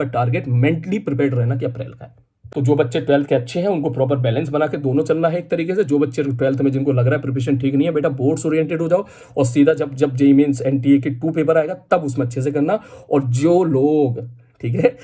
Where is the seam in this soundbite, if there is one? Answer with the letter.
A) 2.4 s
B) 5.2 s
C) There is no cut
A